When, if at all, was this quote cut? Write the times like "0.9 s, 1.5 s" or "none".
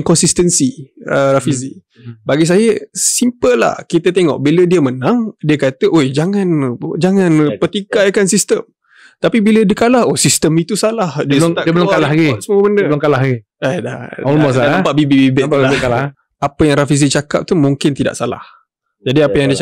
16.2 s